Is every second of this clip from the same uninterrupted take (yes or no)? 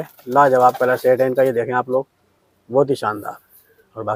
yes